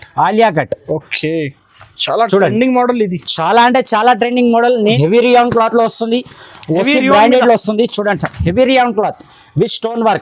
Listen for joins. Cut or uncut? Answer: cut